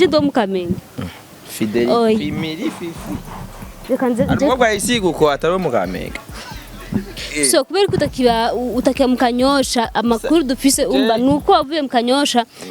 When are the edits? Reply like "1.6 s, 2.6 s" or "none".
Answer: 7.1 s